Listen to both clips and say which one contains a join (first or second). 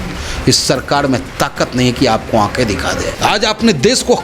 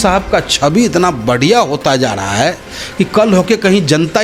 first